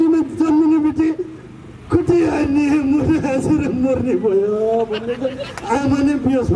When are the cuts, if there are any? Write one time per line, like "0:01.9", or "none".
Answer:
none